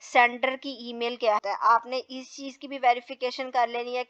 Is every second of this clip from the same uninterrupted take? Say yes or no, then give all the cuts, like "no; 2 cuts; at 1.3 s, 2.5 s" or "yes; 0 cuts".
no; 1 cut; at 1.4 s